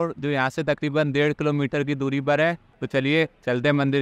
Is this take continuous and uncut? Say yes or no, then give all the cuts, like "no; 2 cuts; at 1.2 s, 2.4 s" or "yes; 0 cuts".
no; 1 cut; at 2.7 s